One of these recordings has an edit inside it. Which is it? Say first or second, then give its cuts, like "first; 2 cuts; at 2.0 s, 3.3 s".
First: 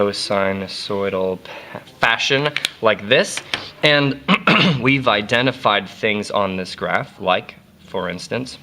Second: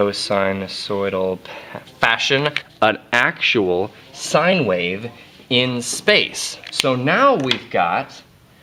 first; 1 cut; at 2.6 s